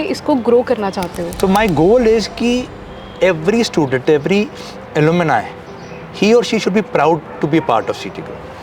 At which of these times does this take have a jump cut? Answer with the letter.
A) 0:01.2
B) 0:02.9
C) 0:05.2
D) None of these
A